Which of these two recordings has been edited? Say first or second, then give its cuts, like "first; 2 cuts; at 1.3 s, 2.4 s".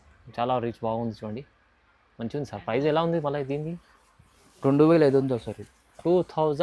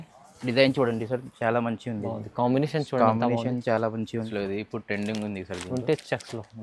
second; 1 cut; at 4.3 s